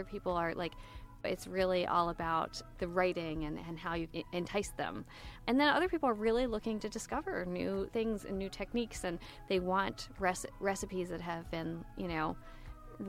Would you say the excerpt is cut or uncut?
cut